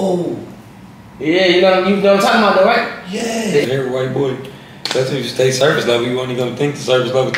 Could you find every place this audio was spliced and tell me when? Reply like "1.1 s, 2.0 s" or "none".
3.6 s